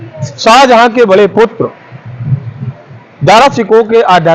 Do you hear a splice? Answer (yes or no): no